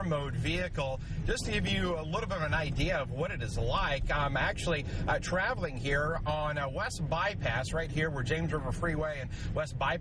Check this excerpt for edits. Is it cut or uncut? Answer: uncut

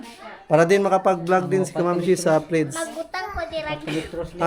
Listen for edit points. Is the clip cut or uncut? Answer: uncut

